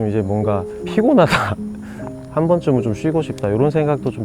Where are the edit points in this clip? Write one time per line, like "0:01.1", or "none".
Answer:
0:01.8